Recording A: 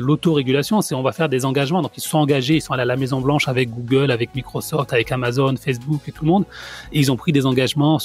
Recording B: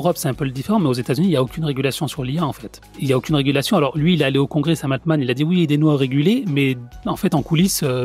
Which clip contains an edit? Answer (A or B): B